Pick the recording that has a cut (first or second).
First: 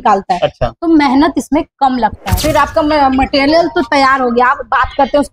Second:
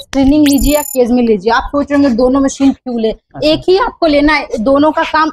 first